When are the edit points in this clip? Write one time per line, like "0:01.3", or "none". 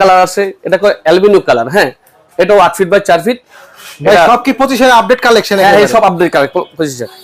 none